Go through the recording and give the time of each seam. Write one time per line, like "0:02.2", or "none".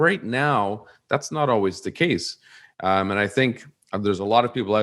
none